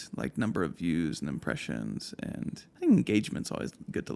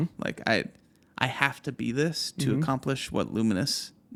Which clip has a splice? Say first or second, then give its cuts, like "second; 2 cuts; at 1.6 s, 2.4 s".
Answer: first; 1 cut; at 2.7 s